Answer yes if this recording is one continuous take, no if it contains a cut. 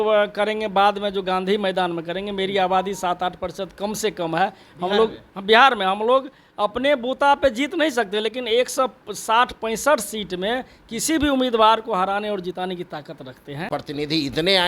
no